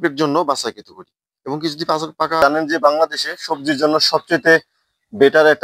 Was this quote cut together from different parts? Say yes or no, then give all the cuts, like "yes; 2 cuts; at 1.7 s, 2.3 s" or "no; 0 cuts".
yes; 1 cut; at 2.4 s